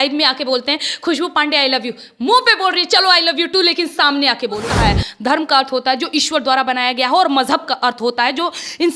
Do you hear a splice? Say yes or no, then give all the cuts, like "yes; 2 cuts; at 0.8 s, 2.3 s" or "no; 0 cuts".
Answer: yes; 1 cut; at 4.7 s